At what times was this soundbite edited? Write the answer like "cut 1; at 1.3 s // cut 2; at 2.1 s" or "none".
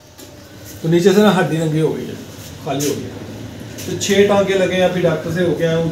none